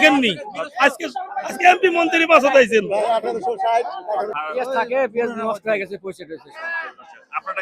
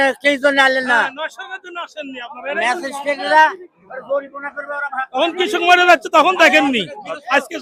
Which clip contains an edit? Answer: first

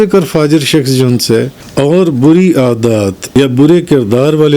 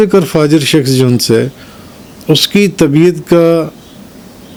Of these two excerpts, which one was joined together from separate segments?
first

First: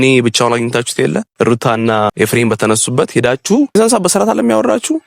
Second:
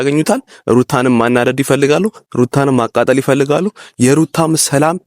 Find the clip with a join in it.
first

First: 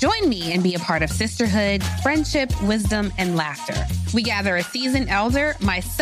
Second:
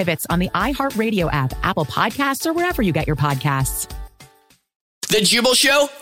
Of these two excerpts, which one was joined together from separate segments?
second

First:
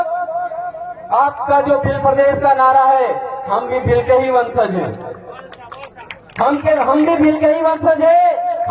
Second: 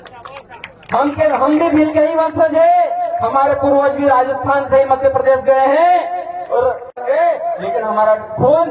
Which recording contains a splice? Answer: second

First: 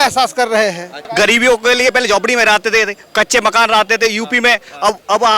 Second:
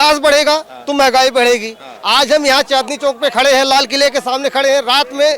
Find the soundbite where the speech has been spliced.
first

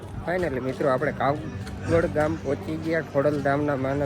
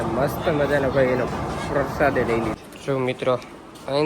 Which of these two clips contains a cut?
second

